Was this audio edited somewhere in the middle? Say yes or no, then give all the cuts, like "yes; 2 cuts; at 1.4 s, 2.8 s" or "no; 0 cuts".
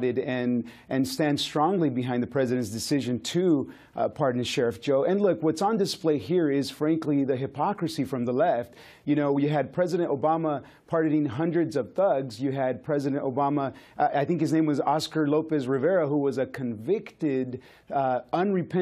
no; 0 cuts